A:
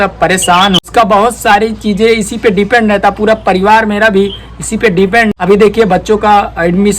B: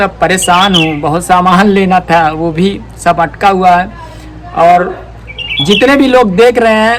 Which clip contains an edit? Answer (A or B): A